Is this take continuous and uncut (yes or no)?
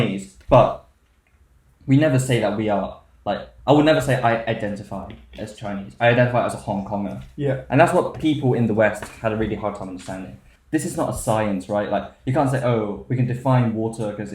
no